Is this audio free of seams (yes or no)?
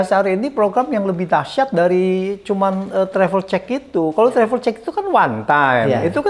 yes